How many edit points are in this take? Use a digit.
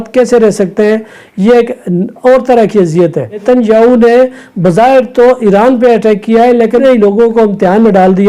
2